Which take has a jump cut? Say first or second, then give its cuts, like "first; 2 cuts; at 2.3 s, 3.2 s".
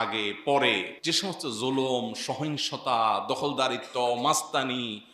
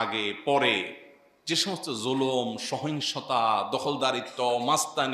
first; 1 cut; at 0.9 s